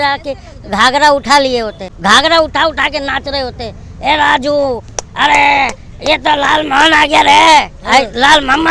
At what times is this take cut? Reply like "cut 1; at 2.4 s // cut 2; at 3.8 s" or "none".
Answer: cut 1; at 1.8 s

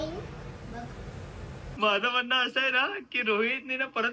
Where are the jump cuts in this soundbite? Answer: cut 1; at 1.7 s

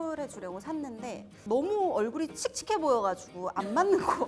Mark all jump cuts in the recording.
cut 1; at 1.3 s

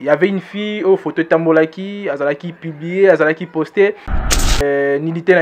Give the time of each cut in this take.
cut 1; at 4.4 s

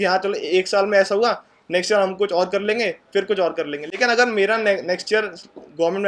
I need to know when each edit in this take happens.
none

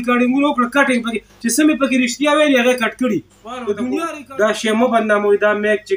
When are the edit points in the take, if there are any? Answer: cut 1; at 4.1 s

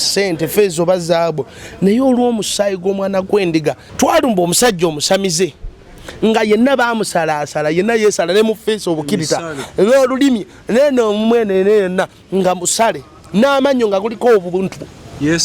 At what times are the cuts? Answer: cut 1; at 3.9 s

